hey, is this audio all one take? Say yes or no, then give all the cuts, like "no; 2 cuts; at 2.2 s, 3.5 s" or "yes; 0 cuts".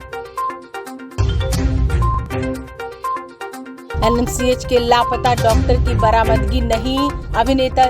no; 1 cut; at 1.0 s